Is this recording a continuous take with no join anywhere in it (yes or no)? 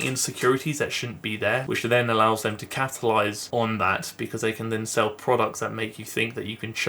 no